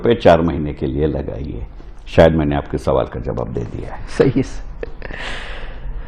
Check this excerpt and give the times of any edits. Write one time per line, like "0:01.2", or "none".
none